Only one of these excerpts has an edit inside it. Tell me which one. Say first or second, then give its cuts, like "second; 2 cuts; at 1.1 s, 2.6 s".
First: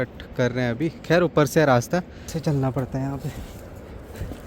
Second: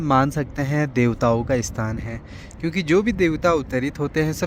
first; 1 cut; at 2.3 s